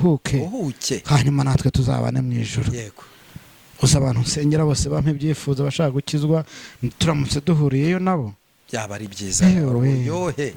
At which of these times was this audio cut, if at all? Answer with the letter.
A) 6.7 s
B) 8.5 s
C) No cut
C